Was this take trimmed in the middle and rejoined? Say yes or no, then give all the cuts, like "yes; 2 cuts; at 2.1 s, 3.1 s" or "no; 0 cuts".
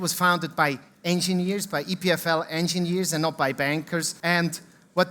yes; 1 cut; at 4.1 s